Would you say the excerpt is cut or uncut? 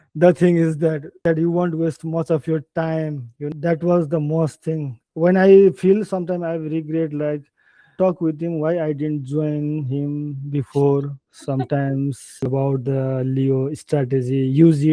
cut